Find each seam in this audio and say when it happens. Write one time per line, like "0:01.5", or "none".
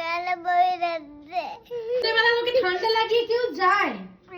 0:02.0